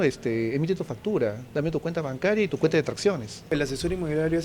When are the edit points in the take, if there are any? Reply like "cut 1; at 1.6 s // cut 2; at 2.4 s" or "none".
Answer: cut 1; at 3.5 s